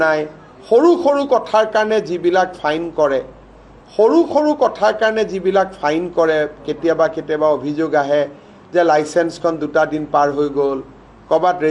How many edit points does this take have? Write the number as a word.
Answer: one